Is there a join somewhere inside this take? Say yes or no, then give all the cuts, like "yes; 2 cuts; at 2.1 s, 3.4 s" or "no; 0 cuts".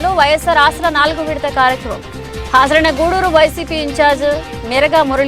no; 0 cuts